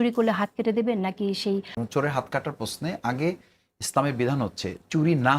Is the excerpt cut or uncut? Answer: cut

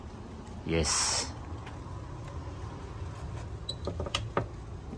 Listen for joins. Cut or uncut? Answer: uncut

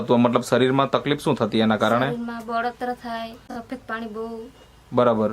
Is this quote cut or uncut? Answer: cut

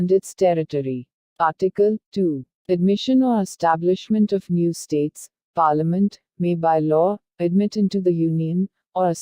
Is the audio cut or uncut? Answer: cut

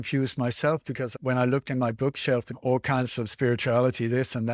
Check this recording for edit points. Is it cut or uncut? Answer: cut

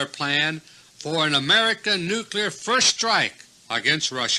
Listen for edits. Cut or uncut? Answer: cut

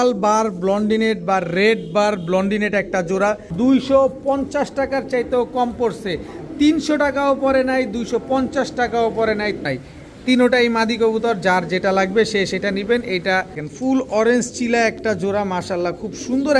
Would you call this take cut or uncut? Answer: cut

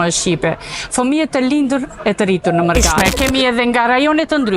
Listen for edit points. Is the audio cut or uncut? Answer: cut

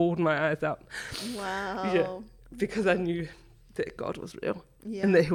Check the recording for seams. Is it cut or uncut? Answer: uncut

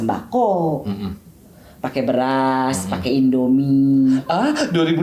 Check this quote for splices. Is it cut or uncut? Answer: uncut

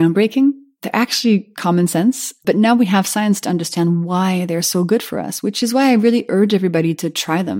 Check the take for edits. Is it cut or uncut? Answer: uncut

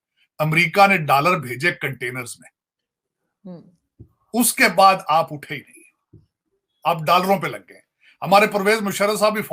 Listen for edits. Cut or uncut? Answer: uncut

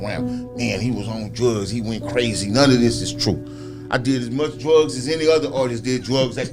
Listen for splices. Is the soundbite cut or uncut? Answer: uncut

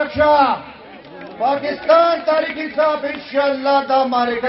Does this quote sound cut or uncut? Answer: uncut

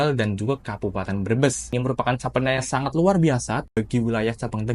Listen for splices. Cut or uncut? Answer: cut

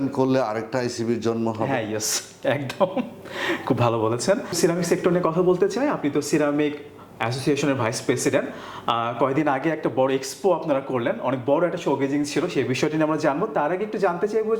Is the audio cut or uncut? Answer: uncut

